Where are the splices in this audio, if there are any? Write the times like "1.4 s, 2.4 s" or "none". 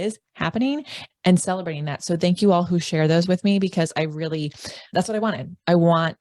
1.0 s

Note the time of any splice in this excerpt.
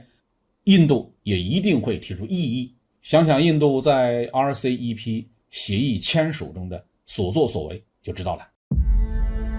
8.5 s

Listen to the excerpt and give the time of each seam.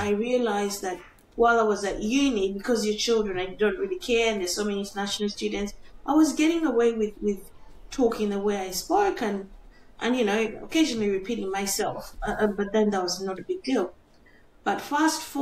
none

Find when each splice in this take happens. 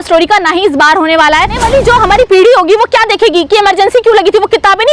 1.6 s

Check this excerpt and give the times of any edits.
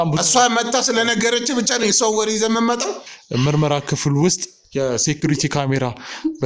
3.0 s

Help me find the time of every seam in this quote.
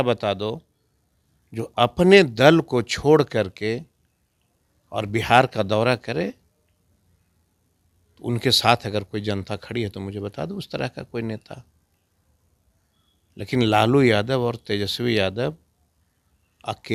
none

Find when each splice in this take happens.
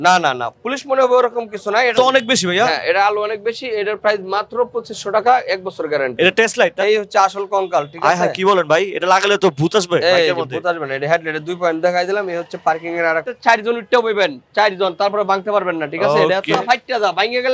1.9 s, 6.8 s, 13.3 s, 16.6 s

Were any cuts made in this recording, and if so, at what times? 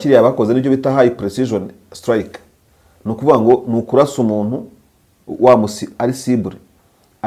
none

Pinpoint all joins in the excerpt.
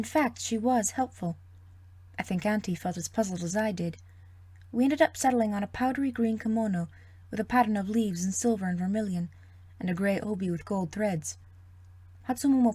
none

